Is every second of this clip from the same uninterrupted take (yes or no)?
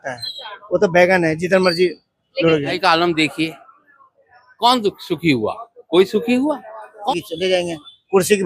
no